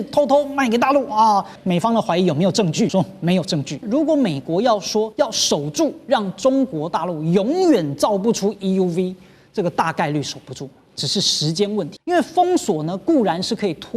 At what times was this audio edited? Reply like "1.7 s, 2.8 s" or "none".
1.6 s, 2.9 s, 3.8 s, 5.1 s, 12.0 s